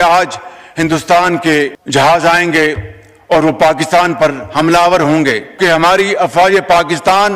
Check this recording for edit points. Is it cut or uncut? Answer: uncut